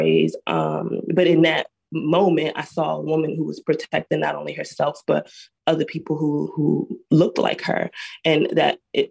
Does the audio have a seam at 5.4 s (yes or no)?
yes